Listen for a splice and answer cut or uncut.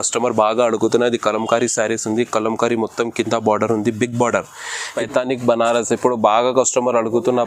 cut